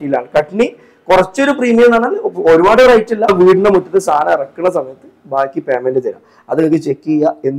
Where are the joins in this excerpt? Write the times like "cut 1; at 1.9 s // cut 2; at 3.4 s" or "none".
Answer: cut 1; at 3.3 s